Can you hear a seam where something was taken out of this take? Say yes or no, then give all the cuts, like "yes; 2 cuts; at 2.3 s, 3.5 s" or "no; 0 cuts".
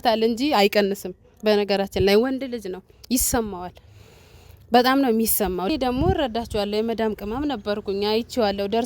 yes; 1 cut; at 5.7 s